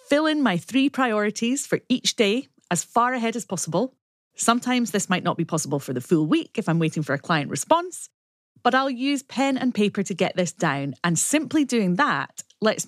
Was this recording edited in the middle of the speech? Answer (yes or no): no